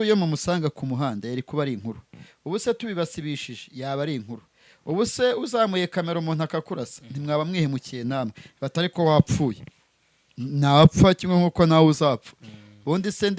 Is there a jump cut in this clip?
no; 0 cuts

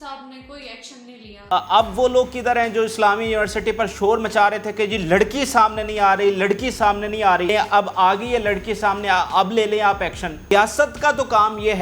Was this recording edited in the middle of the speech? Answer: yes; 3 cuts; at 1.4 s, 7.5 s, 10.5 s

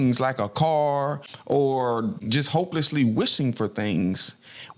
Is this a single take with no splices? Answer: no; 2 cuts; at 1.3 s, 2.3 s

